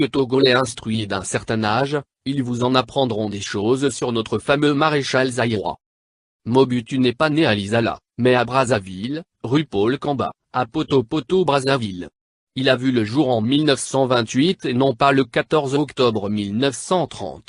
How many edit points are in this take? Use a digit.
1